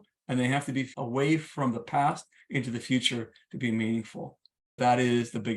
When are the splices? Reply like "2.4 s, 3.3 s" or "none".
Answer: 0.9 s, 4.8 s